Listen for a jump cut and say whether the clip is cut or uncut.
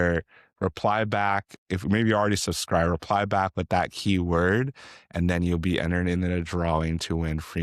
uncut